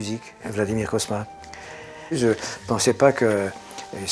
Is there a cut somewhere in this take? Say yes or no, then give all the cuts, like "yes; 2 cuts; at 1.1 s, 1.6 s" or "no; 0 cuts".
no; 0 cuts